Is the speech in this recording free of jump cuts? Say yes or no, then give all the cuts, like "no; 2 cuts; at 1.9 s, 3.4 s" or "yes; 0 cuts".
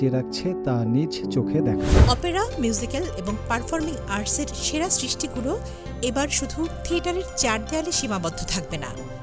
no; 1 cut; at 2.0 s